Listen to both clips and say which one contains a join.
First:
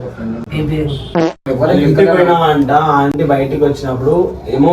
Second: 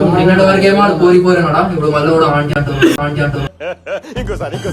first; 1 cut; at 1.4 s

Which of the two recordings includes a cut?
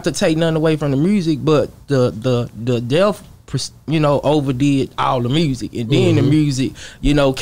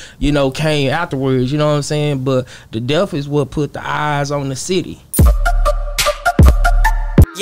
second; 1 cut; at 5.1 s

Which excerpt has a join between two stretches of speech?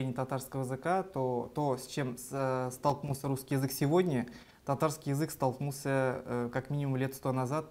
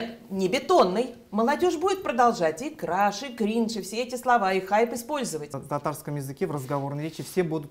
second; 1 cut; at 5.5 s

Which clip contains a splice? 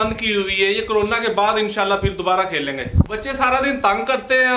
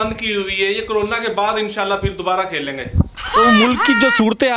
first; 1 cut; at 3.2 s

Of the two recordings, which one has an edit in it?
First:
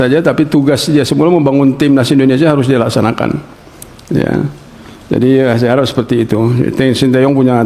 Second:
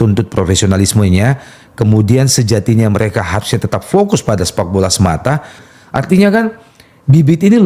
second; 1 cut; at 5.6 s

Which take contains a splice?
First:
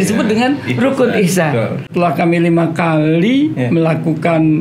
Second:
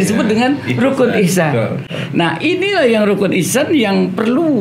first; 1 cut; at 1.8 s

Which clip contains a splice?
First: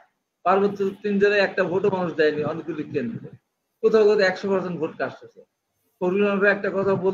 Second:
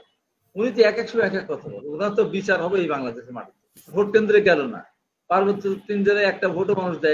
second; 1 cut; at 3.9 s

